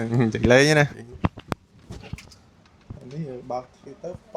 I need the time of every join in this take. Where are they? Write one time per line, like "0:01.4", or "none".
0:00.9